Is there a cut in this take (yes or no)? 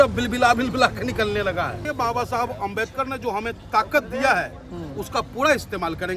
yes